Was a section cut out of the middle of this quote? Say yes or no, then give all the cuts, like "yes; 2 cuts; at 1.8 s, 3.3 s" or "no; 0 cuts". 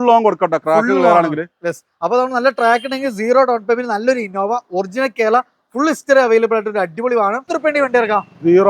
yes; 1 cut; at 7.5 s